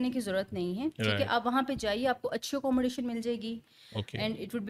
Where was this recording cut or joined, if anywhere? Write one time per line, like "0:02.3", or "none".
none